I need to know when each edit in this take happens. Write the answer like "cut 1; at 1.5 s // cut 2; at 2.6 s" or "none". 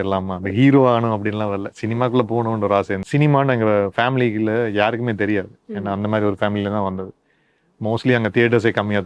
cut 1; at 3.0 s